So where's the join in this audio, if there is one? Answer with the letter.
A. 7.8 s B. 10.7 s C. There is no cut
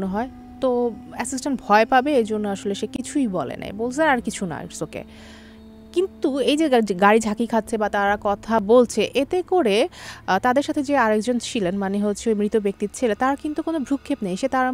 C